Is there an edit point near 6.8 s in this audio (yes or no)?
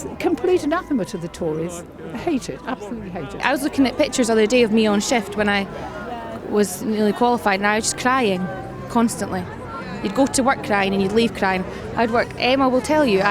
no